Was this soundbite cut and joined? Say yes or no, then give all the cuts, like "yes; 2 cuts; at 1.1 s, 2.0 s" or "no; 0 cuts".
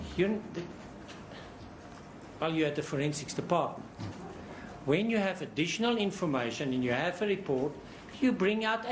yes; 1 cut; at 3.6 s